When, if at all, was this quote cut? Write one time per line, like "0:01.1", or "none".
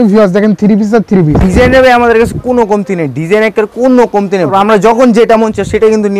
0:01.3
0:04.5